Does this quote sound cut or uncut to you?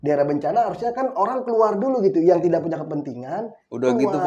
uncut